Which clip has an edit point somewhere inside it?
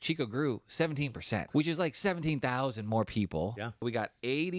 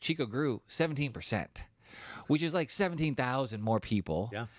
first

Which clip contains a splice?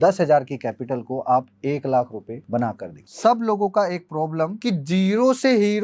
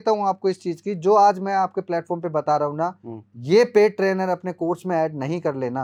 first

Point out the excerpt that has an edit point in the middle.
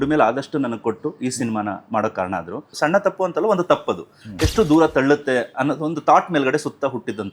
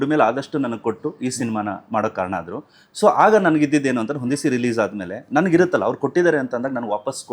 first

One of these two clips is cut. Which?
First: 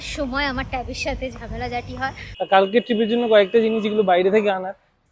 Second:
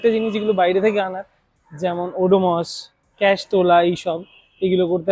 first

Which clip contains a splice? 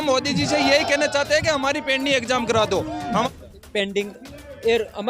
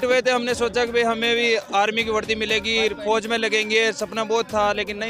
first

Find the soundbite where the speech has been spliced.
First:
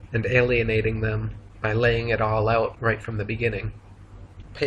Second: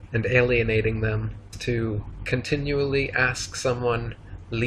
first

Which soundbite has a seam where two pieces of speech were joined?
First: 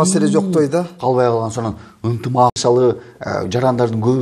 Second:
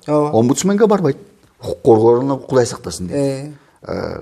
first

